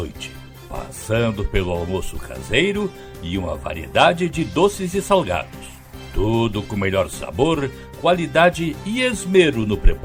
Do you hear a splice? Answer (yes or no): no